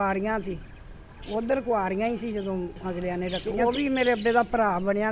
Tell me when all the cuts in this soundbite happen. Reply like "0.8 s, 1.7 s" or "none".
3.4 s

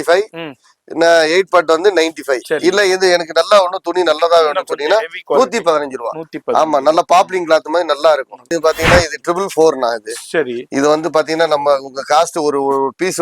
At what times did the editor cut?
8.5 s

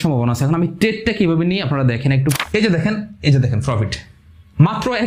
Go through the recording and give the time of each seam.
2.4 s

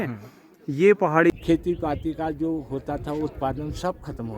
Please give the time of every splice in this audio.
1.3 s

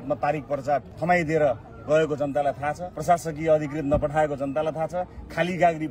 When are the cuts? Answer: 1.0 s, 2.9 s

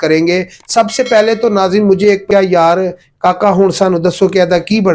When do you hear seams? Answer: 2.3 s

